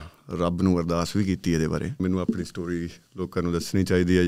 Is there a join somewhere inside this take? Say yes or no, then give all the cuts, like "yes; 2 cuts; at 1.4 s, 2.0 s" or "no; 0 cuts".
yes; 1 cut; at 2.0 s